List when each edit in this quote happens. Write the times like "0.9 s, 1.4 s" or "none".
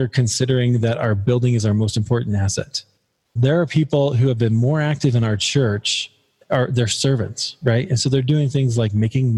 6.4 s